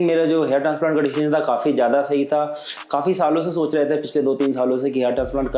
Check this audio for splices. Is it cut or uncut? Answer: uncut